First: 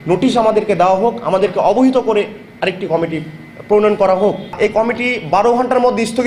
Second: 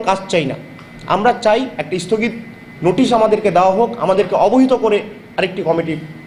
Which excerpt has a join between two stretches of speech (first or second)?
first